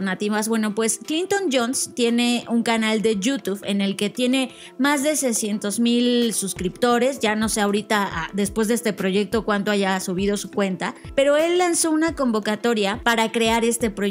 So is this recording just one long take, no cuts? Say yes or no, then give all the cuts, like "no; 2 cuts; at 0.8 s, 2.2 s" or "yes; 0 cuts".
no; 2 cuts; at 11.0 s, 13.0 s